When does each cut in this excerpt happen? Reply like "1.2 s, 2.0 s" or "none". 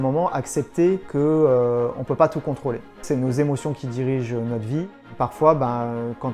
1.1 s, 3.0 s, 5.0 s